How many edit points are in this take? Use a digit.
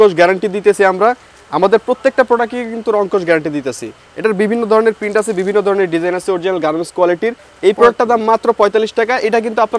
1